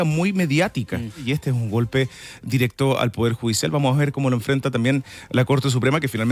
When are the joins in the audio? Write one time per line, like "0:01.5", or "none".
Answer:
0:01.2